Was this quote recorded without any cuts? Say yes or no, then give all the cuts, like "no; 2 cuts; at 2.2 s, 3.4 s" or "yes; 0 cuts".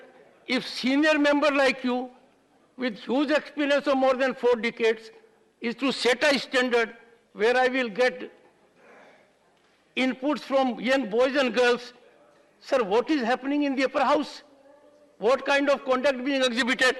yes; 0 cuts